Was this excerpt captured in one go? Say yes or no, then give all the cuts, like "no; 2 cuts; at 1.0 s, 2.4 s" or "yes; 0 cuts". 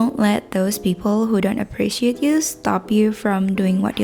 yes; 0 cuts